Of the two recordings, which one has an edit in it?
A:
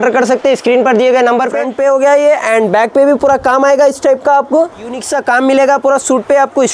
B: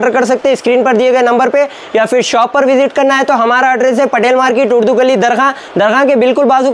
A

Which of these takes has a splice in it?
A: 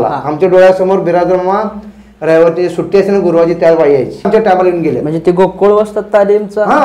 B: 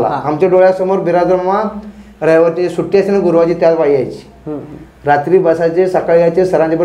A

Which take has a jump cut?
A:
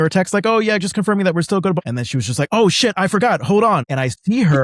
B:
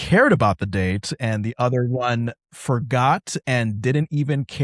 A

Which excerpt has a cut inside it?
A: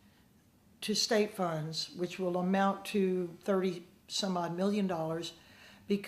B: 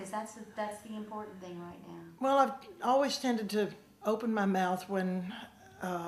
B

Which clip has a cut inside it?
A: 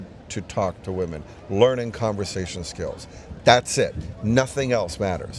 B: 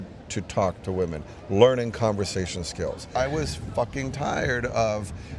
B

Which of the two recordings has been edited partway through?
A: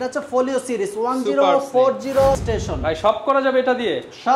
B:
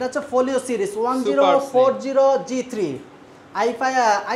A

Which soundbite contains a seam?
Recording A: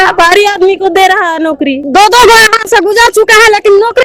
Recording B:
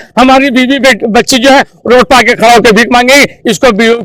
A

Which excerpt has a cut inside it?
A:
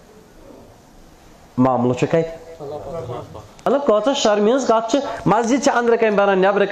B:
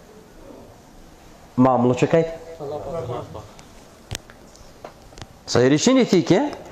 A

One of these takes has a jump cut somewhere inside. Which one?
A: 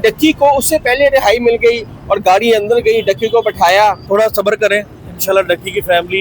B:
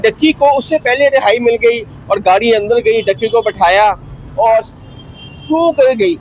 A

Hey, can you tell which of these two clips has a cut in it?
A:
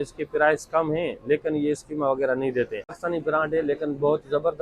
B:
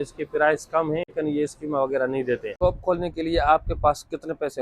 B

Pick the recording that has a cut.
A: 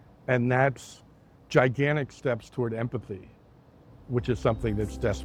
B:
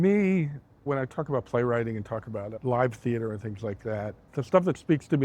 B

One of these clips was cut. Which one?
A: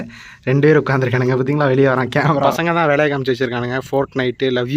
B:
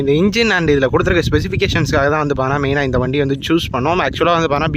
A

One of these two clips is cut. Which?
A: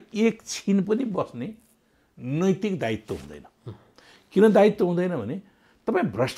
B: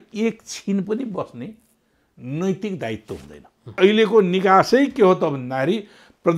B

